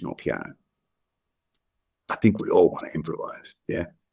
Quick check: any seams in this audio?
no; 0 cuts

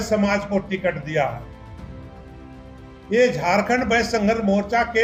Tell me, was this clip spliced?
no; 0 cuts

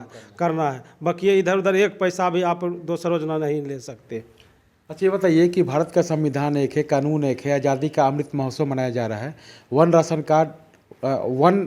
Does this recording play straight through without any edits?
yes; 0 cuts

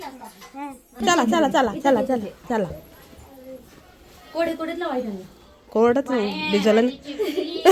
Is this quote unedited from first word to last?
no; 1 cut; at 1.0 s

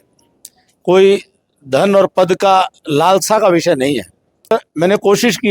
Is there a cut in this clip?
yes; 1 cut; at 4.5 s

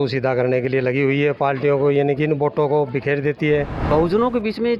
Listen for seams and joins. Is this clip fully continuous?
no; 1 cut; at 3.8 s

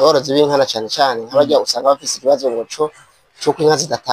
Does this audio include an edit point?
no; 0 cuts

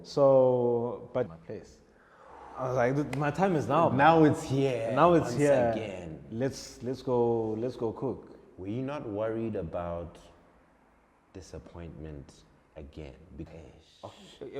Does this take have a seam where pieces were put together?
yes; 2 cuts; at 1.4 s, 13.5 s

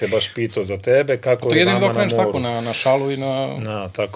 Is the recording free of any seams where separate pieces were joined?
yes; 0 cuts

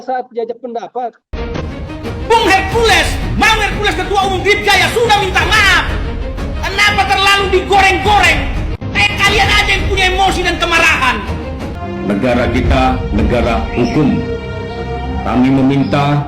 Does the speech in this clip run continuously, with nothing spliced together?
no; 2 cuts; at 1.2 s, 11.7 s

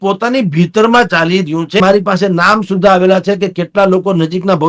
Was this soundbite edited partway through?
yes; 1 cut; at 1.8 s

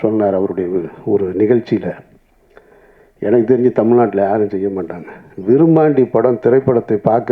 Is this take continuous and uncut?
yes; 0 cuts

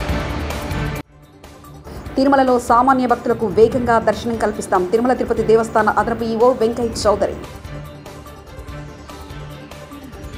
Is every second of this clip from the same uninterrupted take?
yes; 0 cuts

